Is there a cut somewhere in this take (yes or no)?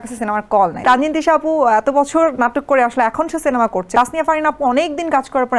yes